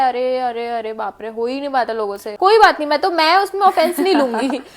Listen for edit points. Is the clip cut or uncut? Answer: cut